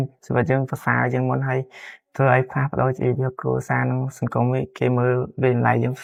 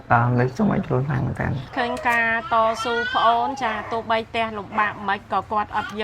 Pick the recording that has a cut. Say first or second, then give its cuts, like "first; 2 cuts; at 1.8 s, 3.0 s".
second; 1 cut; at 1.7 s